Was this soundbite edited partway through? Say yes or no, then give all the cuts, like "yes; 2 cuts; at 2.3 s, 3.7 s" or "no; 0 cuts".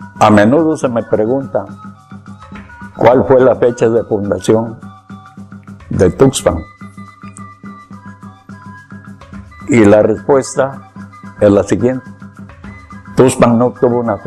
yes; 1 cut; at 9.9 s